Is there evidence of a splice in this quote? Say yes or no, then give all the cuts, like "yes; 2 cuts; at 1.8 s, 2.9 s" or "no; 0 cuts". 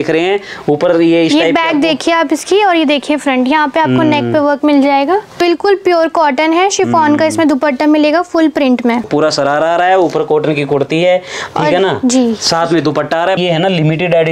yes; 3 cuts; at 5.3 s, 9.0 s, 13.4 s